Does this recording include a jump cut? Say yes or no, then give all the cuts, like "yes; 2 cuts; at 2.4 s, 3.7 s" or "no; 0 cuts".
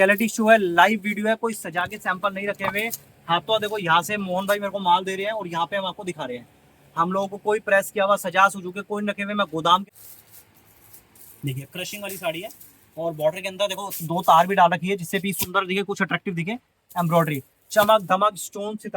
yes; 1 cut; at 9.8 s